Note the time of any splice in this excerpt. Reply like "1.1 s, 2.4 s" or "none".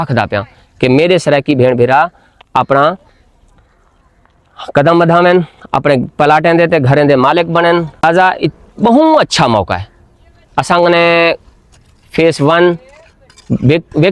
8.0 s